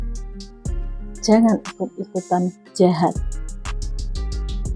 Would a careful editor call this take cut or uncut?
uncut